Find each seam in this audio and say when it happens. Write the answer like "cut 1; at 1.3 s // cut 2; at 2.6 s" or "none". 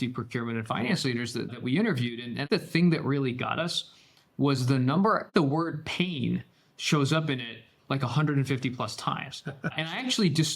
cut 1; at 2.5 s // cut 2; at 5.3 s